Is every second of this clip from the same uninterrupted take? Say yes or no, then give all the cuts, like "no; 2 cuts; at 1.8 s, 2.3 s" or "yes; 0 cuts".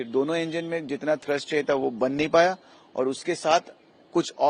yes; 0 cuts